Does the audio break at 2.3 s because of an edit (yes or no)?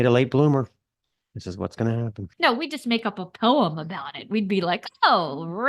yes